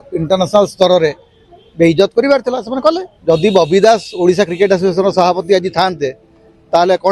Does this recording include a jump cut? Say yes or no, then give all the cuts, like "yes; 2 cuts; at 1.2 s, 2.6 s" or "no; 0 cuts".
yes; 1 cut; at 3.1 s